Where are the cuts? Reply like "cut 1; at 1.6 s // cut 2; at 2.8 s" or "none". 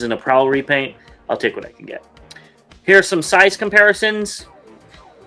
none